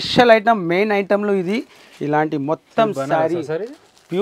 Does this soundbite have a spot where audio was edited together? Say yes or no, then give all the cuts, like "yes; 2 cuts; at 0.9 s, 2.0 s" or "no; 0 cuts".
no; 0 cuts